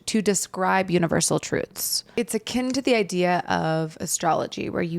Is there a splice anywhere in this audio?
yes; 1 cut; at 2.1 s

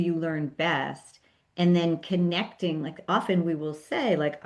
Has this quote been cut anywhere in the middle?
no; 0 cuts

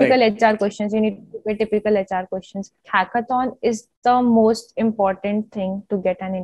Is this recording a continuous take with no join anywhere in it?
no; 1 cut; at 2.8 s

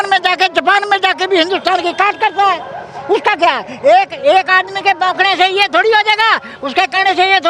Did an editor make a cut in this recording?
no; 0 cuts

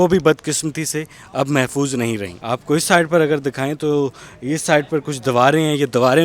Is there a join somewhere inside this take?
no; 0 cuts

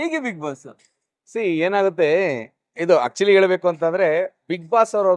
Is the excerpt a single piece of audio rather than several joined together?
yes; 0 cuts

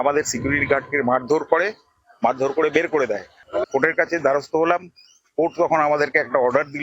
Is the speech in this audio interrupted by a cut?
yes; 1 cut; at 3.3 s

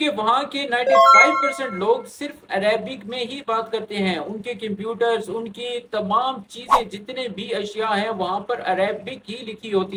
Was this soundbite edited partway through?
no; 0 cuts

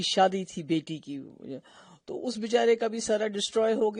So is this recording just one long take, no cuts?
yes; 0 cuts

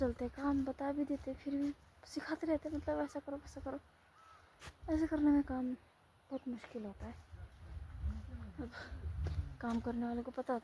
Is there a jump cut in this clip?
no; 0 cuts

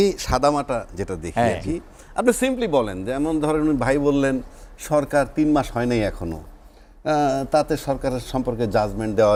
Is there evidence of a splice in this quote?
no; 0 cuts

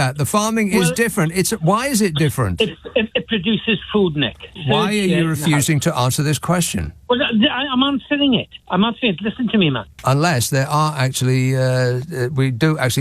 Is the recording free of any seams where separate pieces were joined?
no; 2 cuts; at 4.6 s, 9.9 s

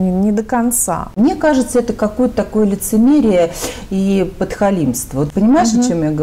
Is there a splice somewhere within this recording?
yes; 2 cuts; at 1.1 s, 5.3 s

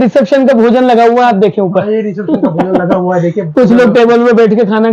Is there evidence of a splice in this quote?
no; 0 cuts

